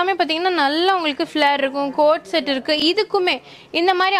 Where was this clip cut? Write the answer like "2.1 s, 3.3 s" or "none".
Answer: none